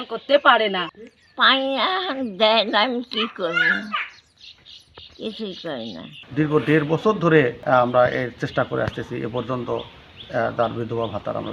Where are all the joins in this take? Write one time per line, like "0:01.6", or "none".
0:06.2